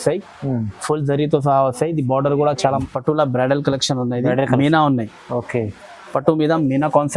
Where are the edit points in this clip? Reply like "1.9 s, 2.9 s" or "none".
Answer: 2.8 s